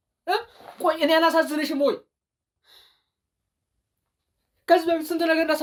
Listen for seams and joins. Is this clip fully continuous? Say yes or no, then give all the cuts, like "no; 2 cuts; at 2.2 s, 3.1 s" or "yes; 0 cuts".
yes; 0 cuts